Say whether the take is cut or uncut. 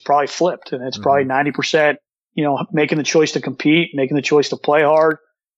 uncut